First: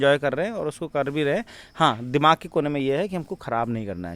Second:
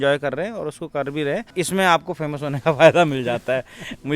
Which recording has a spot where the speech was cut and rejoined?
second; 1 cut; at 1.5 s

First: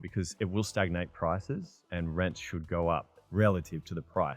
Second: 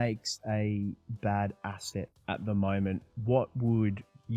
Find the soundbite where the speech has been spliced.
first; 1 cut; at 3.2 s

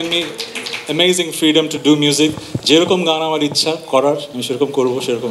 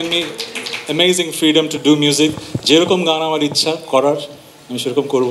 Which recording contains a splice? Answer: first; 1 cut; at 4.3 s

